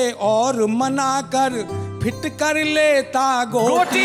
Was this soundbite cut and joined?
no; 0 cuts

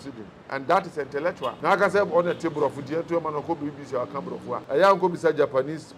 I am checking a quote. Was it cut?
yes; 2 cuts; at 1.5 s, 4.6 s

